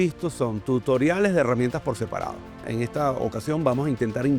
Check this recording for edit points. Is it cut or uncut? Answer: cut